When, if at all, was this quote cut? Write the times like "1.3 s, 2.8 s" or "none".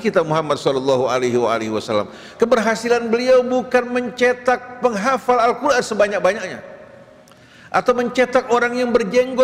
2.2 s